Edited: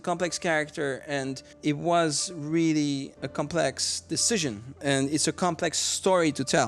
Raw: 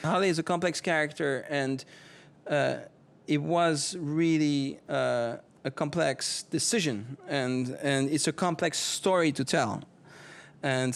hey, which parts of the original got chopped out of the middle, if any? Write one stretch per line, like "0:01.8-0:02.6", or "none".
0:01.9-0:03.1
0:04.8-0:05.5
0:07.2-0:07.7